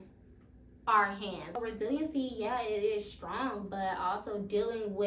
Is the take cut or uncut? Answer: cut